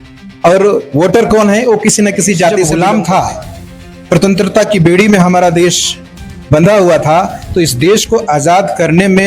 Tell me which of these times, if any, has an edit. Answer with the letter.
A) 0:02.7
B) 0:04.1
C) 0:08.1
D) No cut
A